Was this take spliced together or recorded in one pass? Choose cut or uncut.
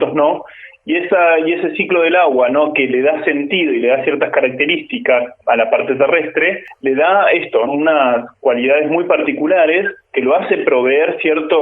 cut